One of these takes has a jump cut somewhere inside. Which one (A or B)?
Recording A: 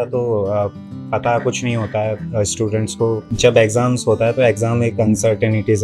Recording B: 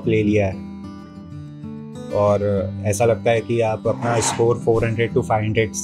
A